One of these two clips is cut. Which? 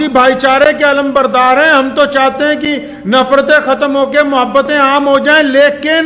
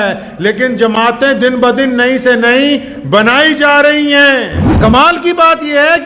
second; 1 cut; at 4.6 s

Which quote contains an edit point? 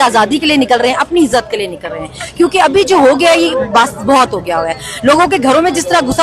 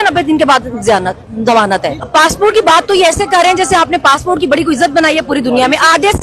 second; 1 cut; at 2.0 s

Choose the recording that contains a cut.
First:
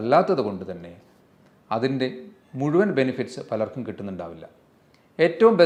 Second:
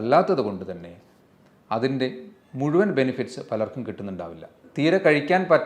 second; 1 cut; at 4.6 s

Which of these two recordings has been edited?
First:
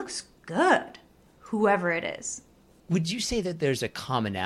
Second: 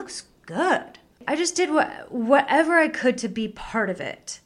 second; 1 cut; at 1.2 s

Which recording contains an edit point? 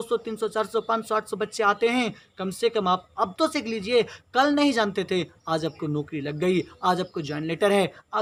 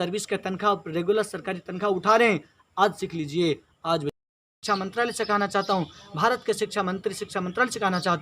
second; 1 cut; at 4.5 s

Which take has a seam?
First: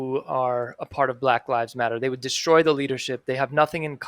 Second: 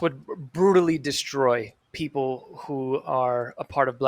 second; 1 cut; at 1.8 s

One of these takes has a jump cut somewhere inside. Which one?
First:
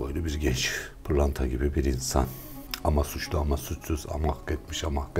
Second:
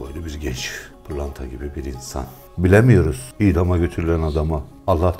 second; 2 cuts; at 2.4 s, 3.2 s

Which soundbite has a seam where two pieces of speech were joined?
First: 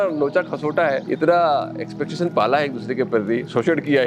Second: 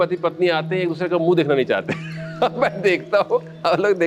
first; 1 cut; at 1.0 s

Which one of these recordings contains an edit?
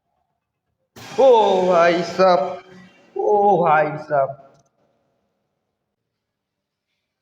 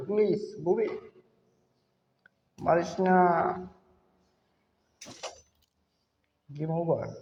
first; 1 cut; at 6.0 s

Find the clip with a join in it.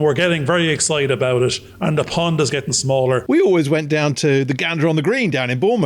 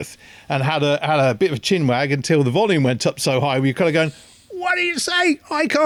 first; 1 cut; at 3.2 s

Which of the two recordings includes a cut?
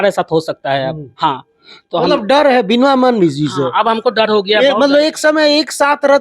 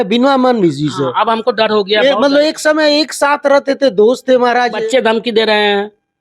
second; 1 cut; at 4.8 s

